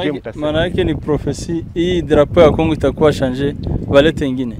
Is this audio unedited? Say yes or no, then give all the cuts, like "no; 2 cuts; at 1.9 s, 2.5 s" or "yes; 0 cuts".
yes; 0 cuts